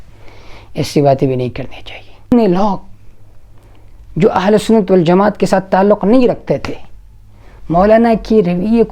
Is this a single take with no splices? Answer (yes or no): no